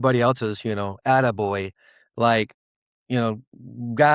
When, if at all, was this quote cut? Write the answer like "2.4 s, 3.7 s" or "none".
none